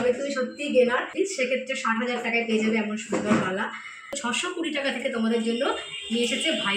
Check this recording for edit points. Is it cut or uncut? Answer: cut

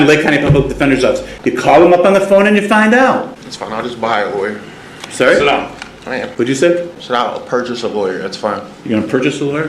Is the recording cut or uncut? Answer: cut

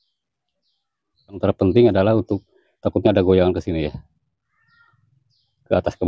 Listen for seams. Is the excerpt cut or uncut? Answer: cut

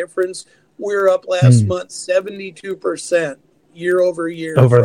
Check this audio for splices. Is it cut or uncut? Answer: uncut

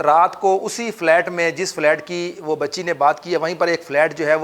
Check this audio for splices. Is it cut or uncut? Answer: uncut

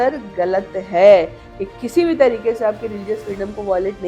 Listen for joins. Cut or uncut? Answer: uncut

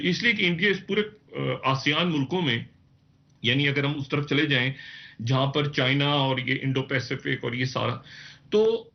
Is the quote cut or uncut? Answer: uncut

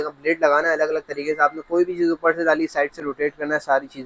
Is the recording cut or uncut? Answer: uncut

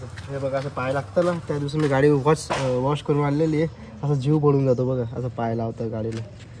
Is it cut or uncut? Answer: uncut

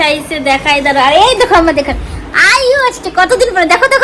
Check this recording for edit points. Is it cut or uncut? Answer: uncut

